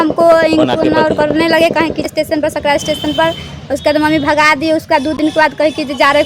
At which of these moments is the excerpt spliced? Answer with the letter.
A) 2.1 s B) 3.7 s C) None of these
A